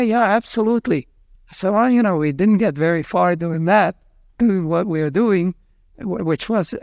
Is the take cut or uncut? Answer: uncut